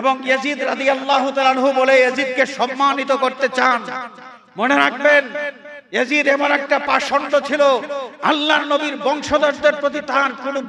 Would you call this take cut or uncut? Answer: uncut